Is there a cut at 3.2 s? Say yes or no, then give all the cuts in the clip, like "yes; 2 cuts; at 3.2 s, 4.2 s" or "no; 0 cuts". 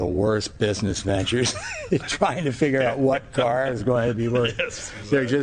no; 0 cuts